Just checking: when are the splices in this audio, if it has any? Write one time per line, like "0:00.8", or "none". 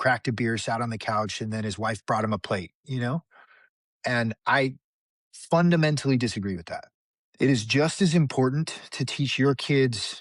0:06.6